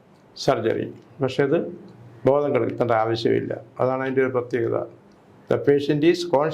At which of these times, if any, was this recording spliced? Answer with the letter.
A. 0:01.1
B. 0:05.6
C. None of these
C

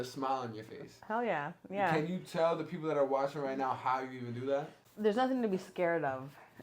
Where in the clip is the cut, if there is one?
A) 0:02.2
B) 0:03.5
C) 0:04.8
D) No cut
C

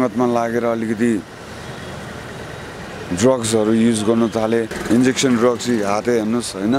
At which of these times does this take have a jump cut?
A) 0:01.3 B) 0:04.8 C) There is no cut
B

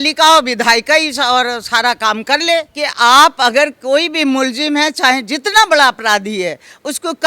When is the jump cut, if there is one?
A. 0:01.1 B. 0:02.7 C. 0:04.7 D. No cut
B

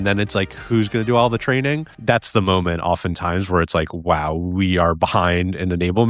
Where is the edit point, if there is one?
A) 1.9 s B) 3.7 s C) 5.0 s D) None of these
A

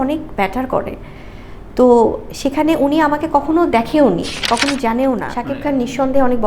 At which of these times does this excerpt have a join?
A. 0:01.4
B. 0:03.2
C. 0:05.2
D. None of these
C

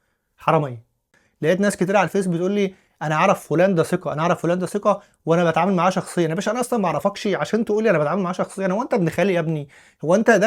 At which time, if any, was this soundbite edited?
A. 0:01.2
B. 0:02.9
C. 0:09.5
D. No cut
A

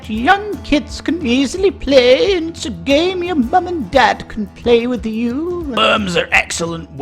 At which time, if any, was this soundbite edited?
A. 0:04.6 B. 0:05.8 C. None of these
B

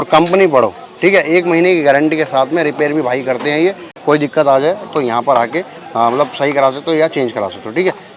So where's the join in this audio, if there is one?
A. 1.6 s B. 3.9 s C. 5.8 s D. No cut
D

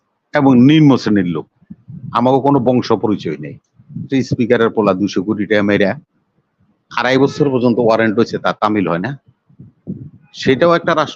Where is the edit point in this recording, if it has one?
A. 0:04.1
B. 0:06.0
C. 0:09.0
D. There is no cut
A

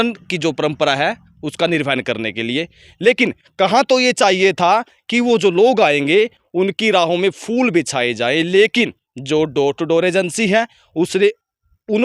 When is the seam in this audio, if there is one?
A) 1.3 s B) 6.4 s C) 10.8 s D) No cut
D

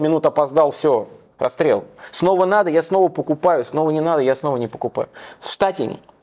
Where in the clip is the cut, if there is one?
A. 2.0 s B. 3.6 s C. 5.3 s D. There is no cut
A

